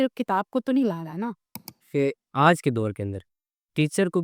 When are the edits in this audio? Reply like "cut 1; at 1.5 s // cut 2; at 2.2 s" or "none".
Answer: cut 1; at 1.9 s